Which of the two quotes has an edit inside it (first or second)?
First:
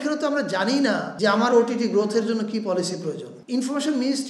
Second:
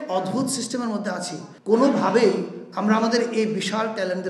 first